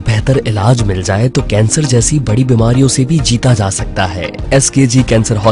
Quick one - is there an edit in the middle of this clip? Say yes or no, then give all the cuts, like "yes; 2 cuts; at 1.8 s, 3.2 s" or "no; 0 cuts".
yes; 1 cut; at 4.5 s